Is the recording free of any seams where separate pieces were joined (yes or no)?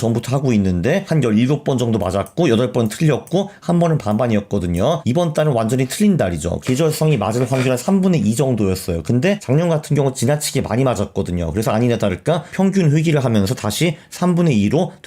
no